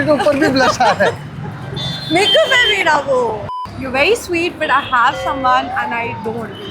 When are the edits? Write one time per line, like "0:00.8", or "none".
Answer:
0:03.5